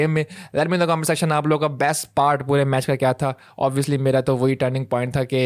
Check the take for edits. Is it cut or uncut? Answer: uncut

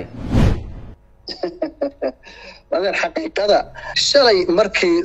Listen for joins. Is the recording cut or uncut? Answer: cut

